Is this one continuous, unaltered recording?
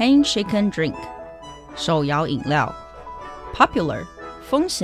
no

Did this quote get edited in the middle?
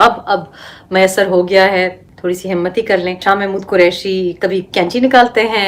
yes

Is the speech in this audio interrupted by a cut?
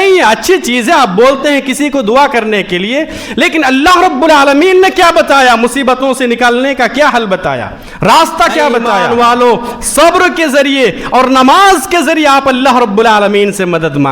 yes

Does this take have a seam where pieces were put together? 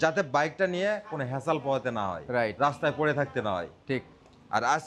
no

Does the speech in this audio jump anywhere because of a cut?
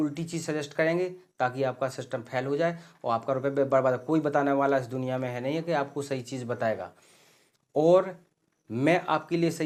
no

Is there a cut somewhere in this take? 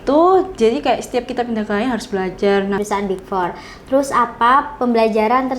yes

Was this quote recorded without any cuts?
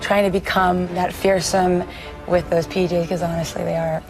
no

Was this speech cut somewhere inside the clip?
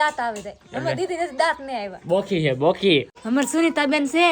yes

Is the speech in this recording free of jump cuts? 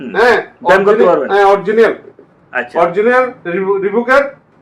yes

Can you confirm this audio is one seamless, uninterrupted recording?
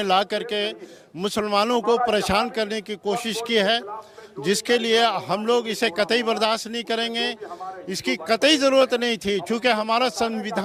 yes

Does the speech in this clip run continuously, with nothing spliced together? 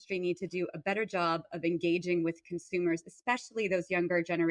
yes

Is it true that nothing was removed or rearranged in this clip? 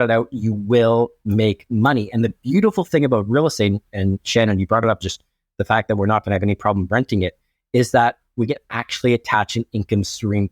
yes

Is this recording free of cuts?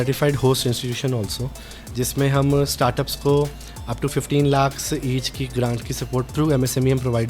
no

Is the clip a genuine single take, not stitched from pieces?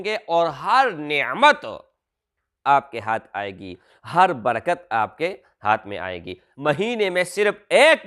no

